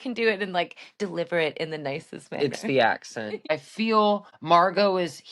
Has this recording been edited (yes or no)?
yes